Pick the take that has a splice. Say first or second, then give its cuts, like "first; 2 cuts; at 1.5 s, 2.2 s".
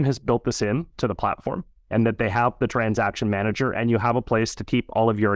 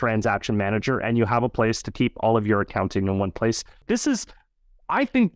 second; 1 cut; at 3.8 s